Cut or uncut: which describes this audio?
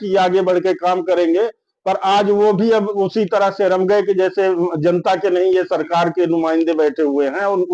uncut